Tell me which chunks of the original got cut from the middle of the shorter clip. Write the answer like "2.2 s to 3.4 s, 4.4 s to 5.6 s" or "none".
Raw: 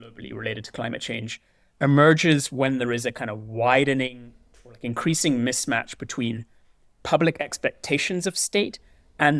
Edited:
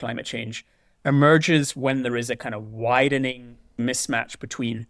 4.5 s to 5.4 s